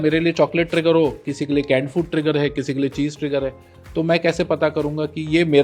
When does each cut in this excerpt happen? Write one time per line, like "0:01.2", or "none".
none